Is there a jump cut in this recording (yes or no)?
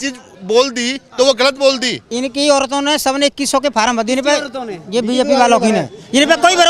yes